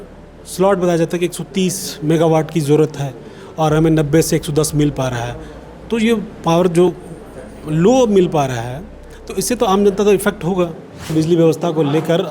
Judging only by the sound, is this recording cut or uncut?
cut